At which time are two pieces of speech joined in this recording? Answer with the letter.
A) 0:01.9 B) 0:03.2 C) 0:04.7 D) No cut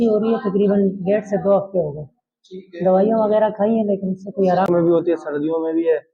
C